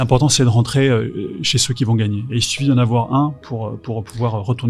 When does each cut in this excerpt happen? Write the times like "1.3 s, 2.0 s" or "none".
none